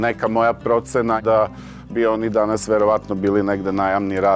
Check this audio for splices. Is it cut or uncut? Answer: cut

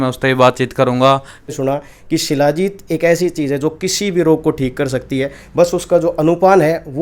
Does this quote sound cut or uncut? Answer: cut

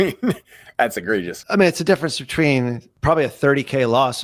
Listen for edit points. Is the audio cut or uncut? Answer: cut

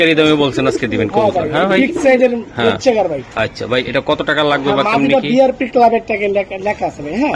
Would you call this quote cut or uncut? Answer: uncut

